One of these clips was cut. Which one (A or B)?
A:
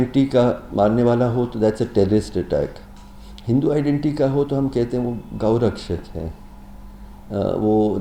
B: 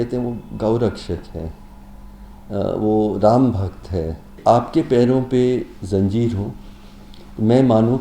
B